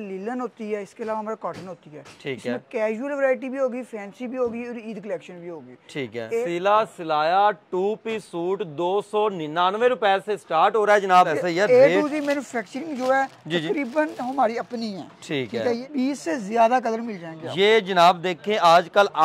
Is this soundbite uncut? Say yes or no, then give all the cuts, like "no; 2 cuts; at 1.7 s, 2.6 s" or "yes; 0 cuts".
no; 3 cuts; at 6.4 s, 11.4 s, 15.8 s